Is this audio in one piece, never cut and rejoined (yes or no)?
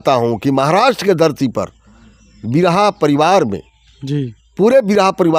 yes